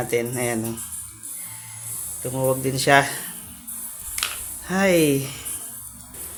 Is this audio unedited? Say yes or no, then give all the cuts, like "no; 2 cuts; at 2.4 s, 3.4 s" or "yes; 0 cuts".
yes; 0 cuts